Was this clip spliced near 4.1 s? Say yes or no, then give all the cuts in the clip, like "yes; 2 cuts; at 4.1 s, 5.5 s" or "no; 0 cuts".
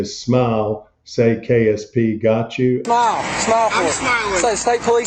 no; 1 cut; at 2.8 s